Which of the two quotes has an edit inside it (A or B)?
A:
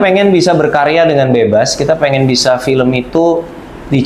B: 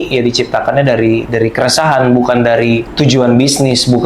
B